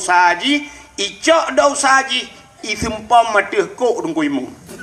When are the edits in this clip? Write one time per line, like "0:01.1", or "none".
none